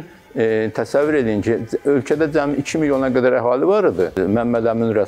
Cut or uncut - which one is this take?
cut